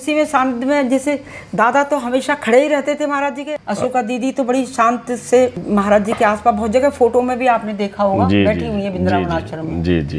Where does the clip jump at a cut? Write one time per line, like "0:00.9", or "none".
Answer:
0:03.5
0:05.6